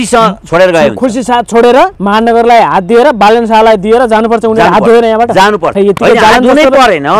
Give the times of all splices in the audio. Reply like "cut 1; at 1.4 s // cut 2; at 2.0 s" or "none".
cut 1; at 2.0 s // cut 2; at 5.7 s

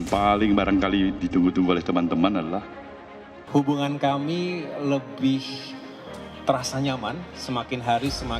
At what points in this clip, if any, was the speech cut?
cut 1; at 3.3 s

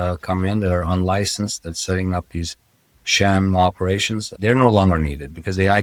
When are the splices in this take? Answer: none

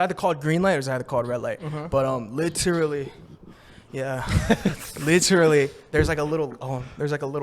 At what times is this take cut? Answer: none

